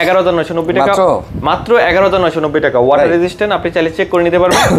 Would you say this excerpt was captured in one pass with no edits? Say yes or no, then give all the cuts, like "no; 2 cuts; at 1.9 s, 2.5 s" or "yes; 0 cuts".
yes; 0 cuts